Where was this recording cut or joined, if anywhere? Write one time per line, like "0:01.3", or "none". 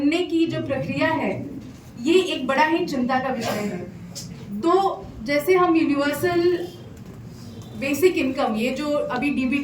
none